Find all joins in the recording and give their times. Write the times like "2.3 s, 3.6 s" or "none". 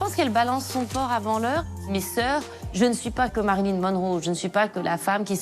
1.8 s